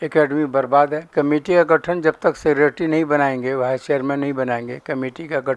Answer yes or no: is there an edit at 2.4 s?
no